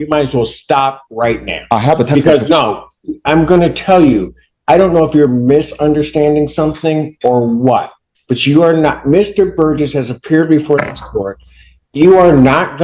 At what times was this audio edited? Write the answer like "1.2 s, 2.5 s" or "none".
none